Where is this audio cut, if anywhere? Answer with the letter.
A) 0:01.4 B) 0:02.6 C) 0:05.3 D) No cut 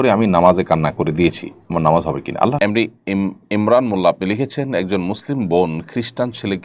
B